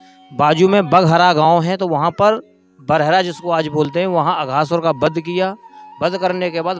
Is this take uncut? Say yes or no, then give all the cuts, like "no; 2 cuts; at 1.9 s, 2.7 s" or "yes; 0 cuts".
yes; 0 cuts